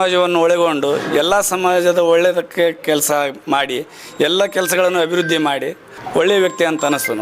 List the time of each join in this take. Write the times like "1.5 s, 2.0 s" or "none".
5.9 s